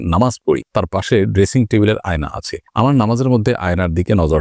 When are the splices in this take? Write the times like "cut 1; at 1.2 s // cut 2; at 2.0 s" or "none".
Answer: none